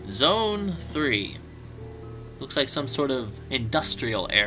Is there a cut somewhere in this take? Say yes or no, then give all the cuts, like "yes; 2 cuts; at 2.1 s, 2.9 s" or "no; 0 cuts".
yes; 1 cut; at 2.1 s